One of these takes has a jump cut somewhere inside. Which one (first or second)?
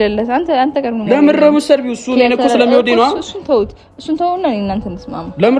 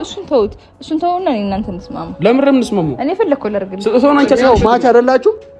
second